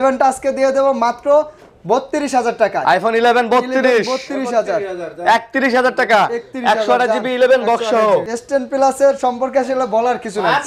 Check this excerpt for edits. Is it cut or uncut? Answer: cut